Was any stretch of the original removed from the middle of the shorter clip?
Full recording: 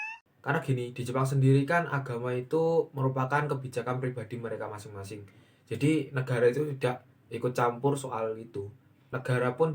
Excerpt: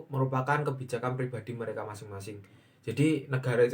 no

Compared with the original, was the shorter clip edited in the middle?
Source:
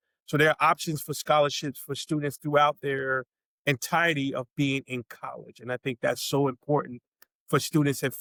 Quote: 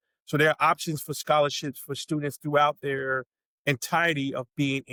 no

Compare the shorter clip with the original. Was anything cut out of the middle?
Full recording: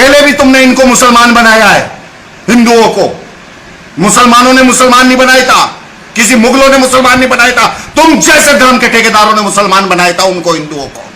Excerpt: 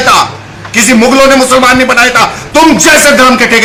no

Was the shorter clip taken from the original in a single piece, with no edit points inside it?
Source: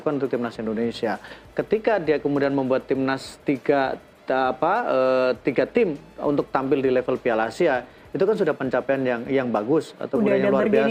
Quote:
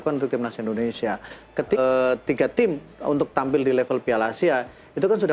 no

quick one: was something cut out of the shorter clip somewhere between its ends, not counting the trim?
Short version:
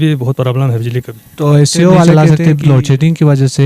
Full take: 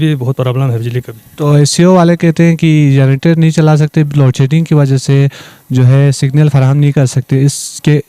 yes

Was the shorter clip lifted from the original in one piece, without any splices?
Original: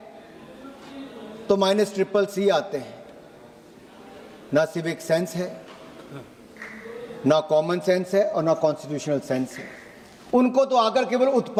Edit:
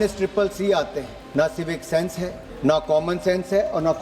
no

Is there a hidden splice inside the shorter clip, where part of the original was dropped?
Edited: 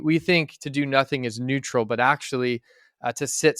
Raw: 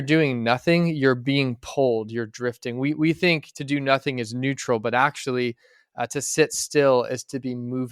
no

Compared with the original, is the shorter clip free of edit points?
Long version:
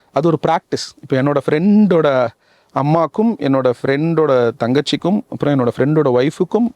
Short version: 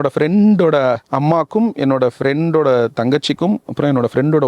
no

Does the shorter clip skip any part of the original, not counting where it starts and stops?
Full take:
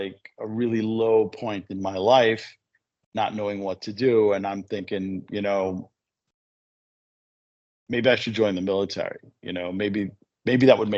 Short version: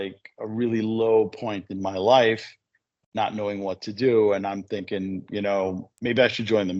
yes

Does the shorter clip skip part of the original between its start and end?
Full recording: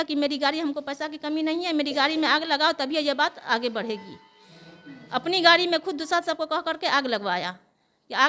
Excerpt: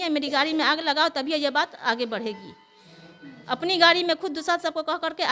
no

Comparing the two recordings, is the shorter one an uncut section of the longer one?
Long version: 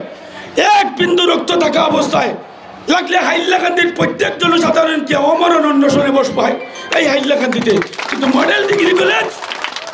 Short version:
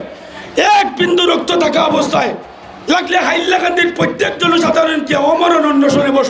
yes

